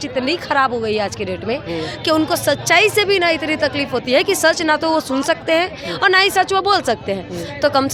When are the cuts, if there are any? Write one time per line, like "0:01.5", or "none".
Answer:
none